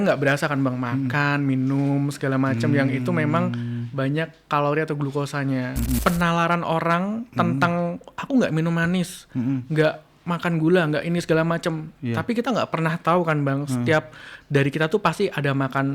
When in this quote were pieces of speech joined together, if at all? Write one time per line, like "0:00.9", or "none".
0:06.0